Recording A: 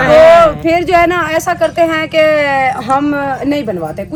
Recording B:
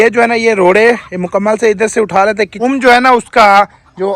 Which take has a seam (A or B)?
B